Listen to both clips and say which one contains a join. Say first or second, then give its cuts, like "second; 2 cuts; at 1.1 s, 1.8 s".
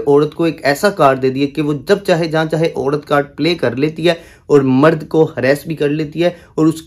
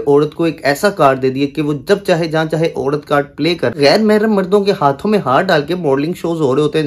second; 1 cut; at 3.8 s